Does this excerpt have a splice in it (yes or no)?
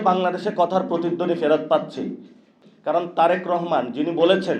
yes